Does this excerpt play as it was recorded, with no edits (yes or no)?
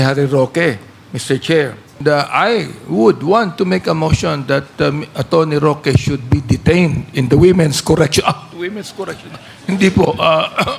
no